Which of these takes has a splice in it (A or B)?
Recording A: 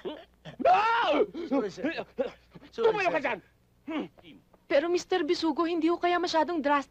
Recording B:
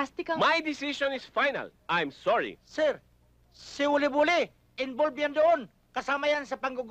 A